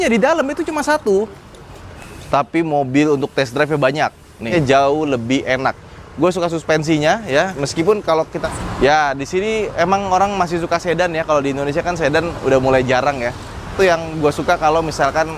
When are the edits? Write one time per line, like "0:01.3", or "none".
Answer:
0:04.4
0:08.4
0:13.7